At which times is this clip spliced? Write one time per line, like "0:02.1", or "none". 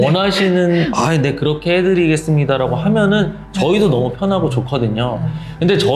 none